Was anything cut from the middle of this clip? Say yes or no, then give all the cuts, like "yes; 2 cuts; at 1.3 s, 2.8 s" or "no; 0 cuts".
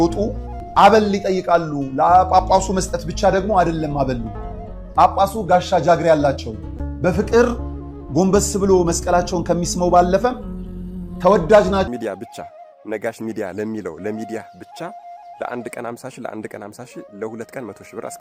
yes; 1 cut; at 11.9 s